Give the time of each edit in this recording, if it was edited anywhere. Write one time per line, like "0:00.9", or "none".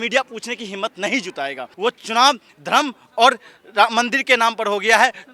0:01.7